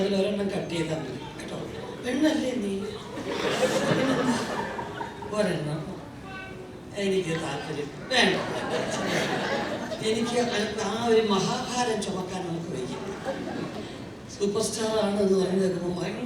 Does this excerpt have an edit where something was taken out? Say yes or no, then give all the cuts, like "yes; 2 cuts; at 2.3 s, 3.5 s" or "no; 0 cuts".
no; 0 cuts